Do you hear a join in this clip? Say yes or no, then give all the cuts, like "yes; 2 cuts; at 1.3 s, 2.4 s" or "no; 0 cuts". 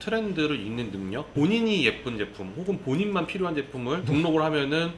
yes; 1 cut; at 1.3 s